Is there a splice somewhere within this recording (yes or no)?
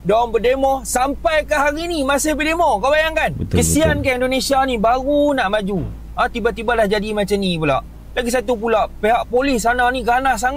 no